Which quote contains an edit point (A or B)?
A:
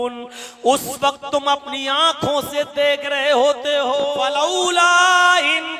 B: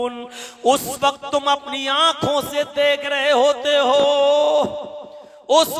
A